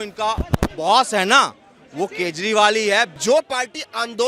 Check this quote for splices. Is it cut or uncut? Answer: cut